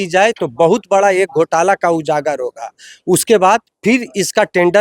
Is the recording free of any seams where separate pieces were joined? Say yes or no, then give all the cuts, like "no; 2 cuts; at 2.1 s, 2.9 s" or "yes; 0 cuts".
yes; 0 cuts